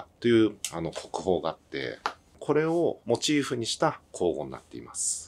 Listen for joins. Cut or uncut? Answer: cut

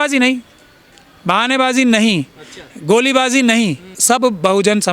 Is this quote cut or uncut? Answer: cut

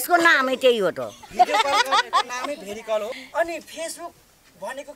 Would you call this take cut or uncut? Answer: cut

